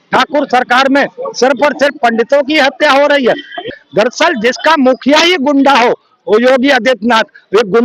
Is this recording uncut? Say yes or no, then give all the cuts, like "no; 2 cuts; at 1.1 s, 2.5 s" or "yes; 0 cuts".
no; 1 cut; at 3.6 s